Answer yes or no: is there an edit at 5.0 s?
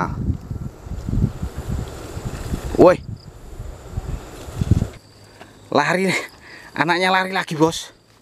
yes